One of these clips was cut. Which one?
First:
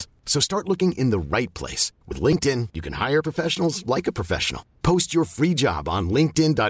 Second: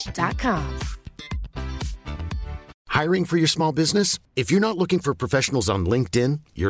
second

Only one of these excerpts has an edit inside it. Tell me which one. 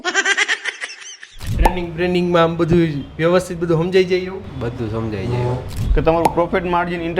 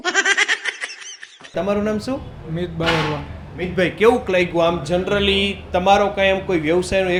first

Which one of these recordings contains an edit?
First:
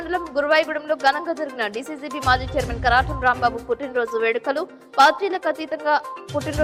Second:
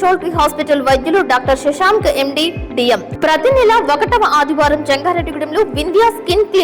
second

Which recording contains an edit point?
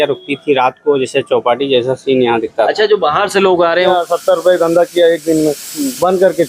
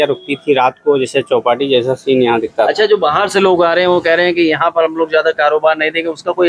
first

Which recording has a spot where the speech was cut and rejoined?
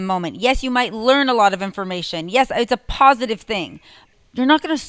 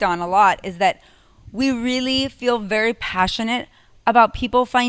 first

